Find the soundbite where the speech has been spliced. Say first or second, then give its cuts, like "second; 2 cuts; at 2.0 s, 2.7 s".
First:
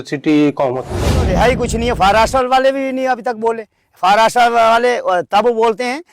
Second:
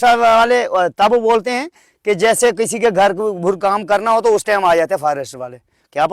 first; 1 cut; at 1.3 s